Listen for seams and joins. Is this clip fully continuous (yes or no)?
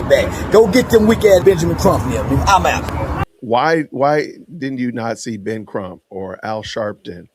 no